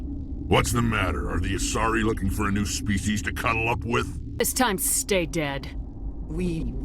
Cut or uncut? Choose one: cut